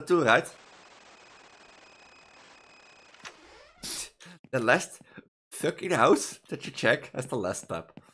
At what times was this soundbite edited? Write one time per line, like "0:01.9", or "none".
0:03.4